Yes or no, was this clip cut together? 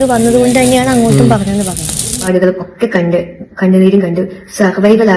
yes